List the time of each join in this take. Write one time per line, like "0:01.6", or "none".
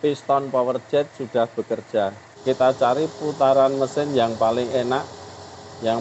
0:02.3